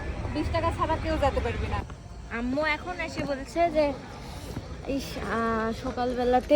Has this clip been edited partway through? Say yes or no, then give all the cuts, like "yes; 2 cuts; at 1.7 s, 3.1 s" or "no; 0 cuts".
yes; 1 cut; at 1.8 s